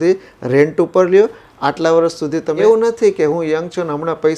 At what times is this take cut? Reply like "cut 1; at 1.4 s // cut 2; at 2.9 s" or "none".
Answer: cut 1; at 2.6 s